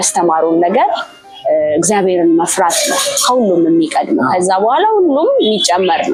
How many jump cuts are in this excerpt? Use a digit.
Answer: 0